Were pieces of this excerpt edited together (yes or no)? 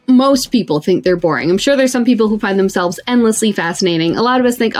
no